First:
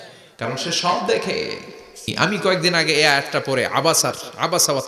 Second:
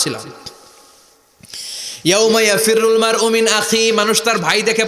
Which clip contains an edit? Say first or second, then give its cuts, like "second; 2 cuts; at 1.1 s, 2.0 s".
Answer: first; 1 cut; at 2.1 s